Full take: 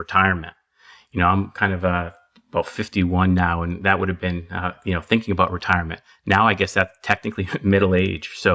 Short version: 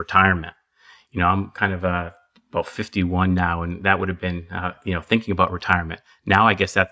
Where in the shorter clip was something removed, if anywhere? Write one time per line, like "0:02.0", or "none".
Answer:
none